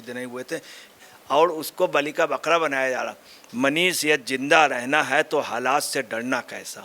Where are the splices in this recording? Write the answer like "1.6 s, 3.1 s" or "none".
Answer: 0.9 s, 3.4 s